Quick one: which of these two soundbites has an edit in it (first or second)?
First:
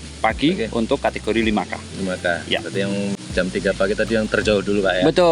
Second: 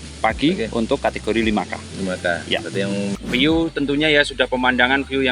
second